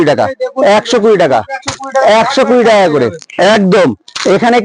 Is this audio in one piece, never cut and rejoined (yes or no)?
yes